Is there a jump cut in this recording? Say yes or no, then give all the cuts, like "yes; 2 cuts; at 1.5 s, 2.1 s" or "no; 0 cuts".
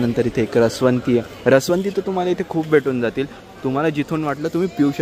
no; 0 cuts